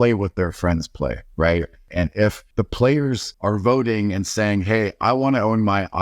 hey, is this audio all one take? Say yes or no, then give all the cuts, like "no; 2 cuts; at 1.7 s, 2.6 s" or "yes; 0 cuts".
no; 2 cuts; at 1.9 s, 3.3 s